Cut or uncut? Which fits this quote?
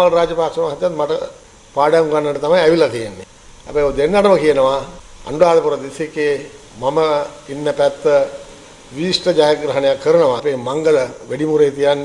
cut